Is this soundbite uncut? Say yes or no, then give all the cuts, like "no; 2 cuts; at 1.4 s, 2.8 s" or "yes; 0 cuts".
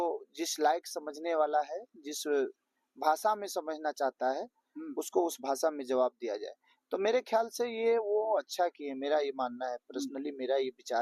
yes; 0 cuts